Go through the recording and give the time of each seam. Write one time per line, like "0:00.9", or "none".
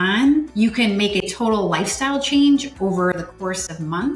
none